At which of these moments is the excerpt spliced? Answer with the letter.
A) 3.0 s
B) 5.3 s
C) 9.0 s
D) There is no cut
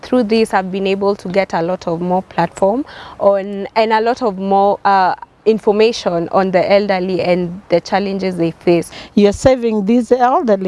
C